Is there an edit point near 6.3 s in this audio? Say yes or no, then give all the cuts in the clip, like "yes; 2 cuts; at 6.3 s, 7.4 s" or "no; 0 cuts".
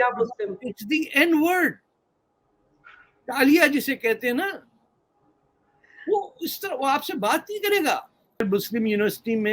no; 1 cut; at 8.5 s